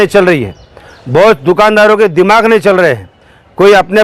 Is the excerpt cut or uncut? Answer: uncut